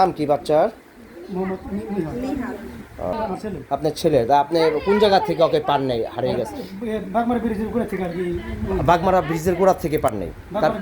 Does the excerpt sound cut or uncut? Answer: cut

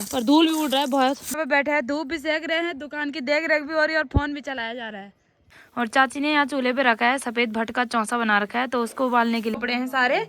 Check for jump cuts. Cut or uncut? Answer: cut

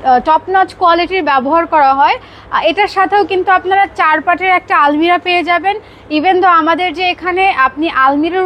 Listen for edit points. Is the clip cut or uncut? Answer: uncut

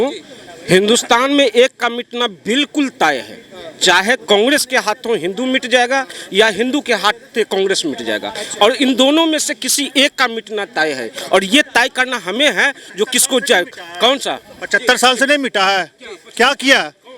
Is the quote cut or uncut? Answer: uncut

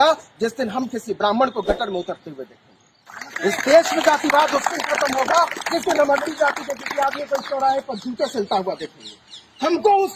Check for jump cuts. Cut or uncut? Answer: uncut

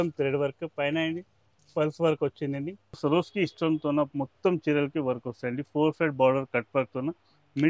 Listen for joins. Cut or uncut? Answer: cut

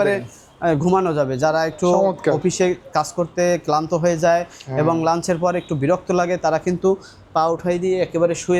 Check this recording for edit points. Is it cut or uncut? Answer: uncut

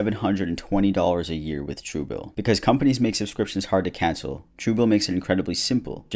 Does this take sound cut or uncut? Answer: uncut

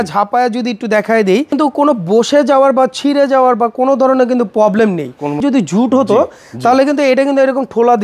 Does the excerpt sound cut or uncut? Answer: cut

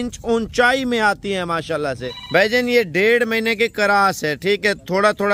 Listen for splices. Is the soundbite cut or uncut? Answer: cut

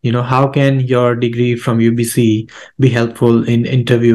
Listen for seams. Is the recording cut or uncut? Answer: uncut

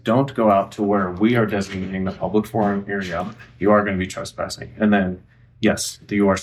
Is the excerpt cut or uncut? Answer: uncut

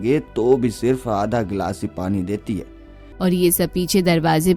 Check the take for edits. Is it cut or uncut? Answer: cut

